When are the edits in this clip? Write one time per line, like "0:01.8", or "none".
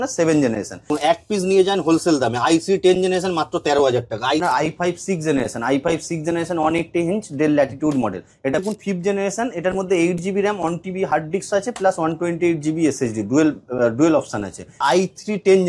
0:00.9
0:04.4
0:08.6
0:14.8